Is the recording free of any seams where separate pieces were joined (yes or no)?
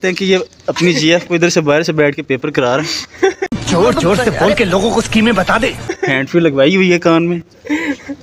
yes